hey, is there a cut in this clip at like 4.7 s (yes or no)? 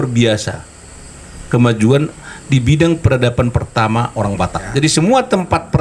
yes